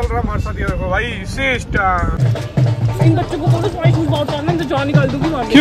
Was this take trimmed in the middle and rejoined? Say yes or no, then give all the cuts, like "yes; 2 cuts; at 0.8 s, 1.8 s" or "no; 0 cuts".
yes; 1 cut; at 2.1 s